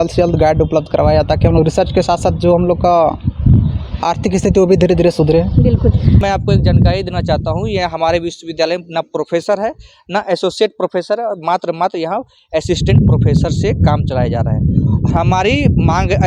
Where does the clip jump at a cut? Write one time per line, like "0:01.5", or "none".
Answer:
0:06.2